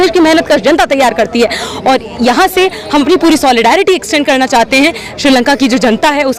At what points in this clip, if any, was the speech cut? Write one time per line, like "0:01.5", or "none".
none

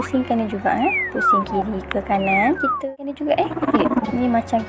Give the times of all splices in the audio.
0:02.7

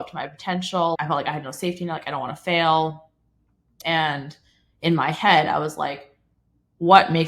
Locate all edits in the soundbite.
0:01.0
0:03.7

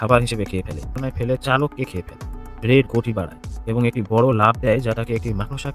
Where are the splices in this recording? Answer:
0:01.0

